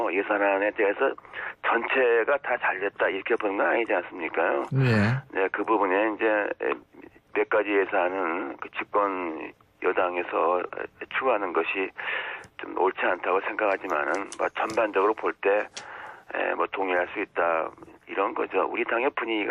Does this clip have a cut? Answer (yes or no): no